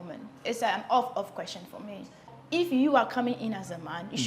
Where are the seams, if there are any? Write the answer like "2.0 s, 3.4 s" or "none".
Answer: 2.3 s